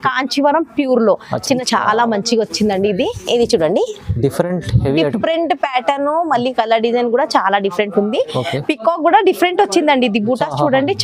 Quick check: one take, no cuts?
no; 1 cut; at 1.6 s

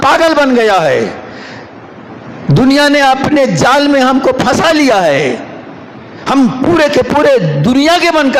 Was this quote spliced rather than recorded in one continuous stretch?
no; 0 cuts

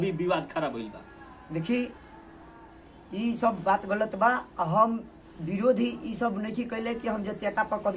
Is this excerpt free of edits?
yes; 0 cuts

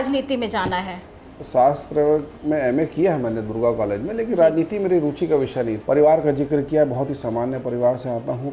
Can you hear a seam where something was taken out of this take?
yes; 2 cuts; at 1.3 s, 5.8 s

